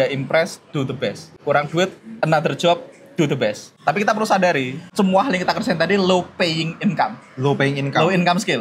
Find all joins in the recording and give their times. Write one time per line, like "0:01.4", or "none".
0:01.3
0:03.7
0:04.8